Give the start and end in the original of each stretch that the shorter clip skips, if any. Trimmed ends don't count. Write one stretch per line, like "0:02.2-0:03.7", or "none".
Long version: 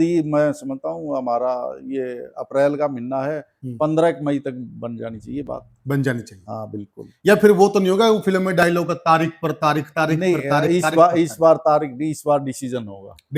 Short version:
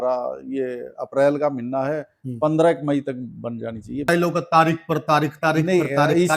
0:05.5-0:08.6